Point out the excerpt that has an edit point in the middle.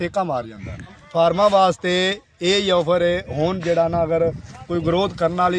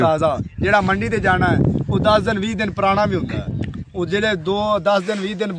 first; 1 cut; at 1.0 s

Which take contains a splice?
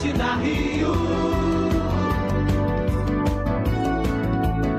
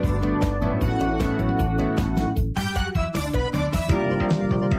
second; 1 cut; at 3.9 s

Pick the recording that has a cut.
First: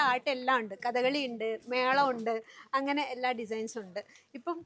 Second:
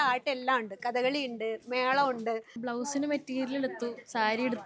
second; 1 cut; at 2.6 s

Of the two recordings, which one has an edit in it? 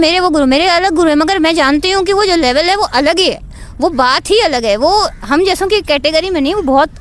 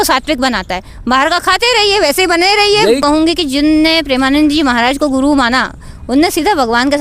second; 1 cut; at 3.0 s

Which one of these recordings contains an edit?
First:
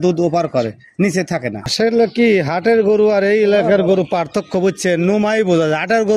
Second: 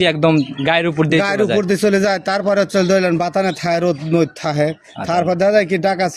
first; 1 cut; at 1.6 s

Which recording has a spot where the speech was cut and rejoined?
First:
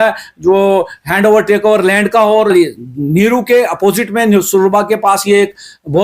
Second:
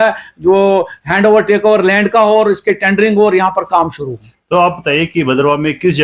first; 1 cut; at 2.5 s

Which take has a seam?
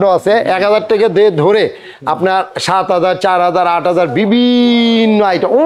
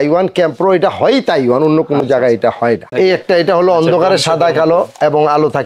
second; 1 cut; at 2.9 s

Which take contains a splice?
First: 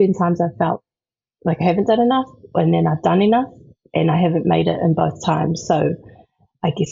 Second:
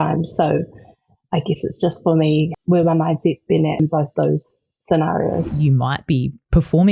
second; 3 cuts; at 2.5 s, 3.8 s, 5.5 s

